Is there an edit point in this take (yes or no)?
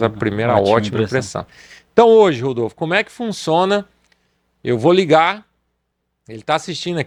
no